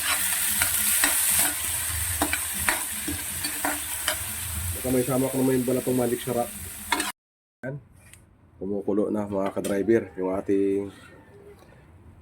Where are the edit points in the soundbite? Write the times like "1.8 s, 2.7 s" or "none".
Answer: 7.1 s